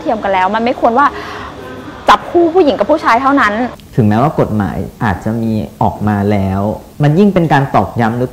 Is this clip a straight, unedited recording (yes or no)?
no